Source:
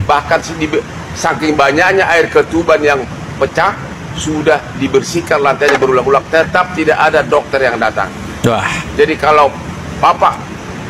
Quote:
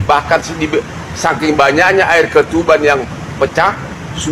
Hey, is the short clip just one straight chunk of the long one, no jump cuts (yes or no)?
yes